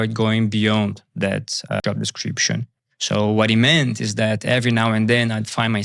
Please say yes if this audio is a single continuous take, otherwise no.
no